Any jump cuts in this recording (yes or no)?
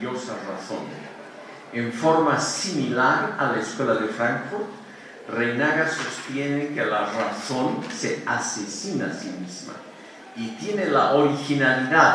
yes